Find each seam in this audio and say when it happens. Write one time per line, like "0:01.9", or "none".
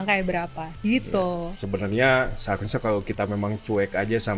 0:01.5